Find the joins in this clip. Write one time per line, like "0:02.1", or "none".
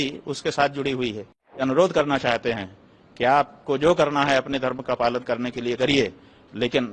0:01.6